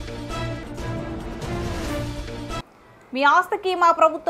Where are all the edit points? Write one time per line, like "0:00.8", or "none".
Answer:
0:02.7

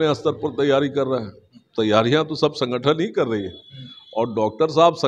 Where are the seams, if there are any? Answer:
none

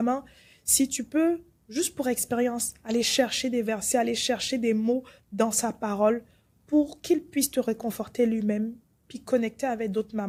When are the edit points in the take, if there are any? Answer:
none

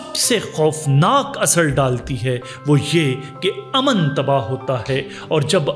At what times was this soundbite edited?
none

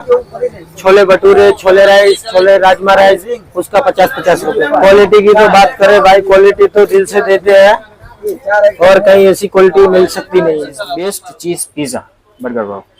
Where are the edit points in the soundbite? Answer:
0:04.7
0:11.3

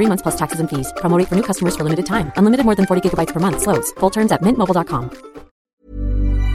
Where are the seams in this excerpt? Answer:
0:05.6

